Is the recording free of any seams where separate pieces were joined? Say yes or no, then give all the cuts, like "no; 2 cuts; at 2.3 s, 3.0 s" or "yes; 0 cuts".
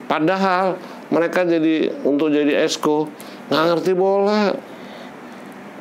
yes; 0 cuts